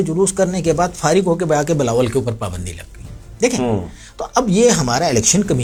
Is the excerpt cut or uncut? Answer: uncut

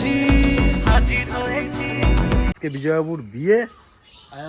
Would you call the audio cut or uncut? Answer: cut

